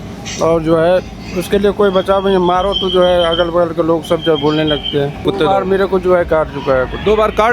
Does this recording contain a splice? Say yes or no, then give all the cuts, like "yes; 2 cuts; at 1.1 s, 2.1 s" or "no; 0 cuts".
yes; 1 cut; at 5.2 s